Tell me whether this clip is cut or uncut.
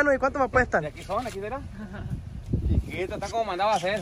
uncut